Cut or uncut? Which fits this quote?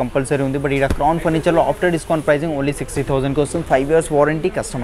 uncut